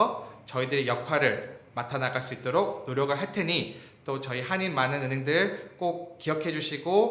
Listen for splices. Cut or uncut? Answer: uncut